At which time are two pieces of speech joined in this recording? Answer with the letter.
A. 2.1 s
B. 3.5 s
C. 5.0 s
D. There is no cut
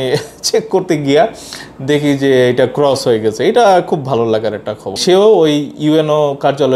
C